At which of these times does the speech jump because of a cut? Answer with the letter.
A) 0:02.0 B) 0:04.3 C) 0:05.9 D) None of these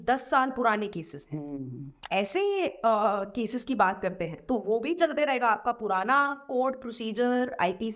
A